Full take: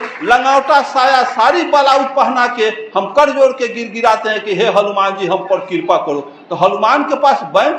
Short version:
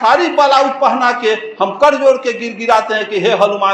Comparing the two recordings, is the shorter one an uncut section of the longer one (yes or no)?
yes